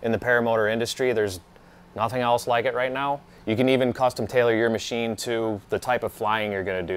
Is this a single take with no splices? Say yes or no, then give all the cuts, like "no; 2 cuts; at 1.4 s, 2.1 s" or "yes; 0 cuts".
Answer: no; 1 cut; at 3.3 s